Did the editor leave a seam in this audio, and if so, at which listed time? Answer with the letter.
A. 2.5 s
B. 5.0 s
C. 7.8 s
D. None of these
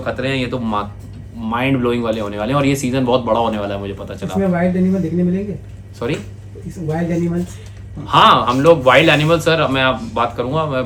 D